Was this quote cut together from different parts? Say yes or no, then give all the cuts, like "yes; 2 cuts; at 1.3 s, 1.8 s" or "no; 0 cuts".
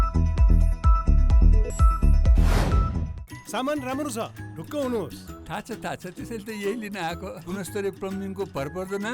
yes; 1 cut; at 3.0 s